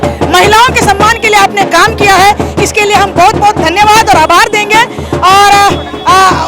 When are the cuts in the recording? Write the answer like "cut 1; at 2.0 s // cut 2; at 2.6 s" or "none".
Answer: none